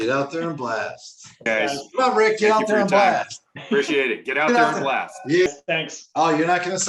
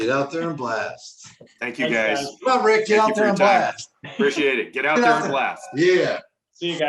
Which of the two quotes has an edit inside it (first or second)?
first